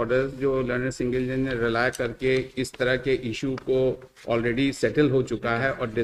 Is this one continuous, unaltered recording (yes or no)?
yes